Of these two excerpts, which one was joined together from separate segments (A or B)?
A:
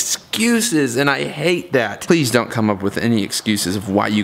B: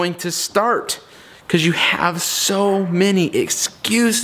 A